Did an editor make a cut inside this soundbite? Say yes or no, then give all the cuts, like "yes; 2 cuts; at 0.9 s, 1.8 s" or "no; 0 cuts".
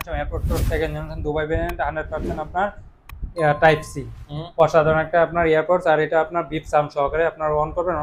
no; 0 cuts